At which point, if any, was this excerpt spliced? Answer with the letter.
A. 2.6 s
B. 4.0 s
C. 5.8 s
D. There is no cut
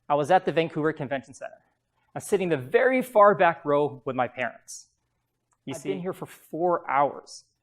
C